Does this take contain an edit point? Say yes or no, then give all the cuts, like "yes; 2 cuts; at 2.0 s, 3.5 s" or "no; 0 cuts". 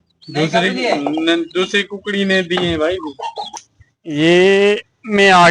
yes; 1 cut; at 3.5 s